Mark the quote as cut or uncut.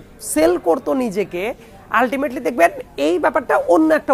uncut